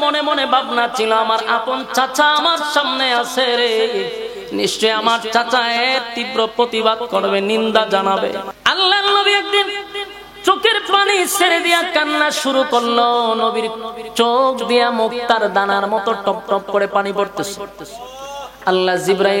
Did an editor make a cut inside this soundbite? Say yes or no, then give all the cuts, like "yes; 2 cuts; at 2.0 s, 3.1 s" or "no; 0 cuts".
yes; 1 cut; at 8.5 s